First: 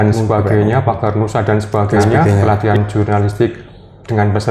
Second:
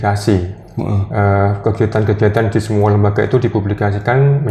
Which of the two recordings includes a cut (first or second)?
first